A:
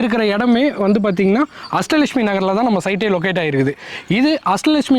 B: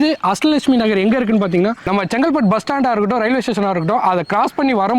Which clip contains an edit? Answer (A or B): B